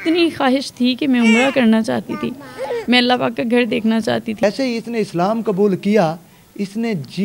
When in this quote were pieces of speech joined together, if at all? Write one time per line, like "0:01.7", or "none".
0:04.4